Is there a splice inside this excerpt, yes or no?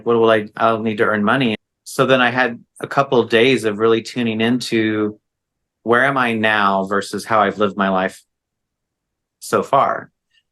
yes